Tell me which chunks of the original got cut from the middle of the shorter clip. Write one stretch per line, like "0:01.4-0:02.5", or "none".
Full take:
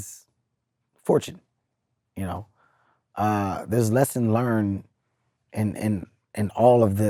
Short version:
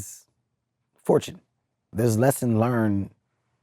0:01.9-0:03.6